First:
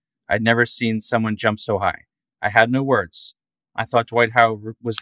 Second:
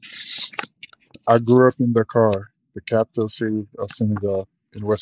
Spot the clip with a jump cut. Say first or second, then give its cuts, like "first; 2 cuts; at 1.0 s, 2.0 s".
second; 1 cut; at 1.2 s